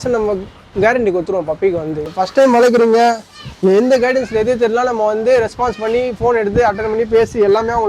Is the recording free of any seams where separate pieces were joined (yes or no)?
no